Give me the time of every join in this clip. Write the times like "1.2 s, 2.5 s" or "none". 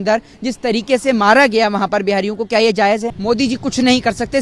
3.1 s